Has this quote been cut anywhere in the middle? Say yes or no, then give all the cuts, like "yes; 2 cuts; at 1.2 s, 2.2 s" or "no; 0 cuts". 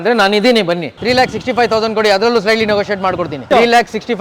yes; 2 cuts; at 0.9 s, 3.4 s